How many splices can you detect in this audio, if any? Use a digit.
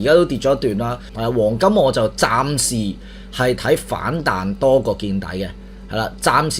1